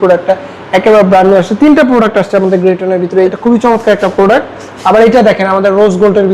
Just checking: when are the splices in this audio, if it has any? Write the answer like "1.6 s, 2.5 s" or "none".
3.3 s